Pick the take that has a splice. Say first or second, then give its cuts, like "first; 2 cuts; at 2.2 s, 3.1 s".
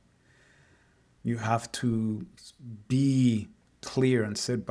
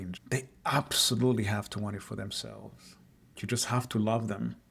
second; 1 cut; at 3.3 s